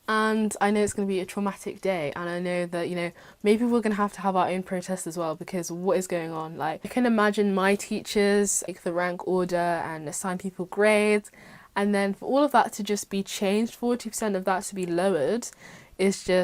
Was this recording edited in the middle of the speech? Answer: yes; 2 cuts; at 6.9 s, 8.7 s

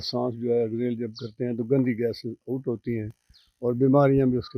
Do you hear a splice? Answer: no; 0 cuts

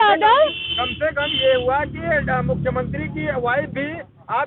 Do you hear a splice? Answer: no; 0 cuts

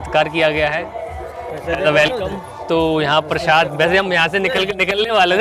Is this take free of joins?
yes; 0 cuts

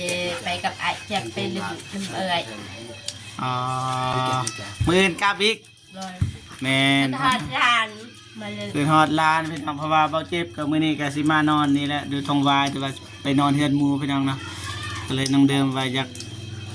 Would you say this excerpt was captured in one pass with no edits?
yes; 0 cuts

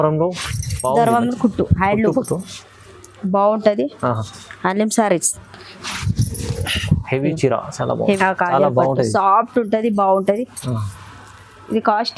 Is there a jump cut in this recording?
yes; 1 cut; at 8.2 s

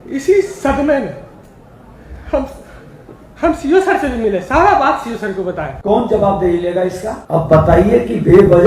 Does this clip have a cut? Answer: yes; 2 cuts; at 5.7 s, 7.1 s

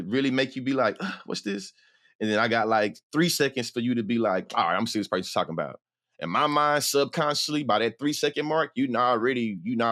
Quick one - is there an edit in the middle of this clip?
no; 0 cuts

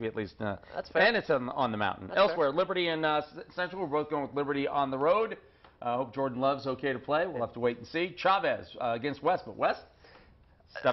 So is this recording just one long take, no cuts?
no; 1 cut; at 6.8 s

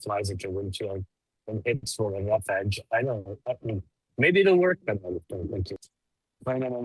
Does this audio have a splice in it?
yes; 1 cut; at 5.8 s

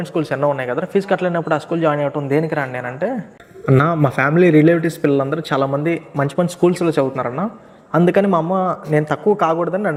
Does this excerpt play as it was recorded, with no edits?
yes; 0 cuts

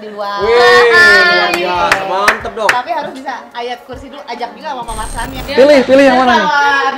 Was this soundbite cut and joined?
yes; 1 cut; at 5.4 s

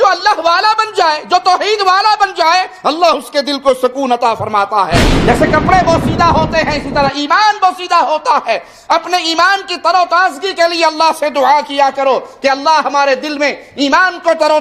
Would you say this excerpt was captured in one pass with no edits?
no; 1 cut; at 5.1 s

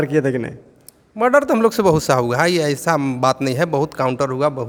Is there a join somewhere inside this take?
no; 0 cuts

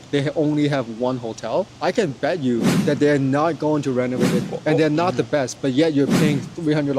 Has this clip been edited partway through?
yes; 2 cuts; at 1.7 s, 4.4 s

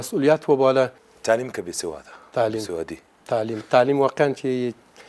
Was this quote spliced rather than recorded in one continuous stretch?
yes; 1 cut; at 1.1 s

